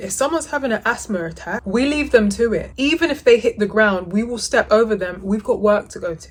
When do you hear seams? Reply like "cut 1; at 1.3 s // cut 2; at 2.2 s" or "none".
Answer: none